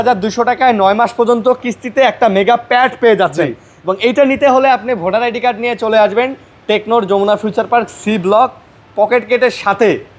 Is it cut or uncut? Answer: uncut